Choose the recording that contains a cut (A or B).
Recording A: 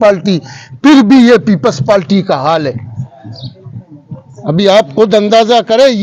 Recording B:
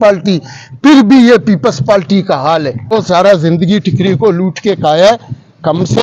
B